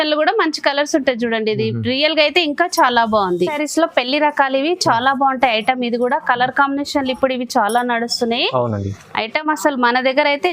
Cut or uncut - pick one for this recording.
cut